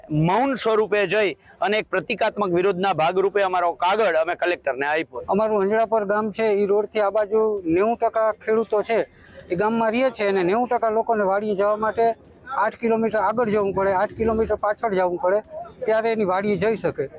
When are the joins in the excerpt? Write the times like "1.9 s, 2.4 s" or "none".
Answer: 5.1 s